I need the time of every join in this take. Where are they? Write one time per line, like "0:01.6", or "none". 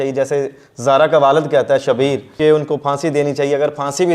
0:02.3